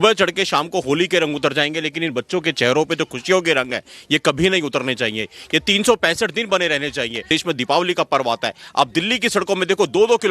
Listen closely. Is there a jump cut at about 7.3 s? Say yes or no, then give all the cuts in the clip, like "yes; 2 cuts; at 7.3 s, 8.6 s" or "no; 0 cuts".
yes; 1 cut; at 7.3 s